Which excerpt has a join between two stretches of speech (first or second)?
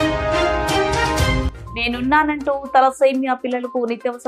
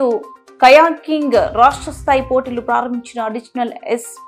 first